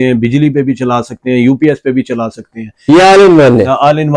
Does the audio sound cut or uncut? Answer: uncut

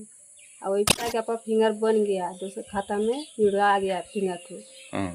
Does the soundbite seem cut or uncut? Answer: cut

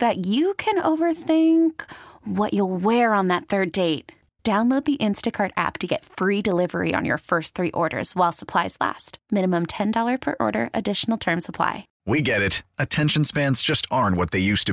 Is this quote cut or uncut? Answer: cut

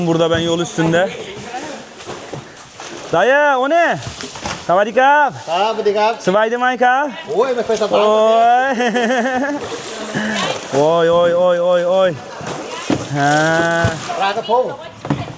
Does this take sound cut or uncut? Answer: uncut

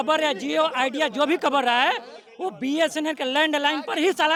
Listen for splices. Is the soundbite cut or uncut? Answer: uncut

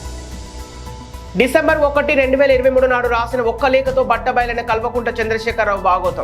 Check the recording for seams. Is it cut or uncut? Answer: cut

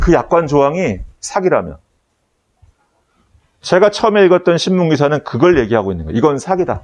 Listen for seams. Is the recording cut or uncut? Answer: uncut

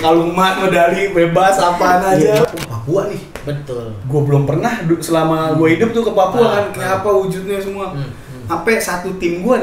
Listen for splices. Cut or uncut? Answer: cut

